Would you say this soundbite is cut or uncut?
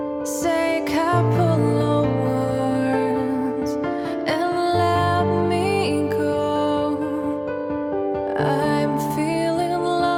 uncut